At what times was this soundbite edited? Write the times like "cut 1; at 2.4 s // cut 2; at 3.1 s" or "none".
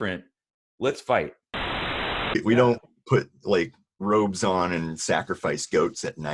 cut 1; at 1.9 s